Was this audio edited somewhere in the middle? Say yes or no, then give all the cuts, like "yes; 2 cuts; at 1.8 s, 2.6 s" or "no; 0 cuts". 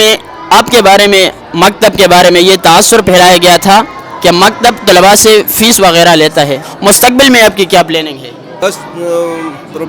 yes; 2 cuts; at 6.7 s, 8.6 s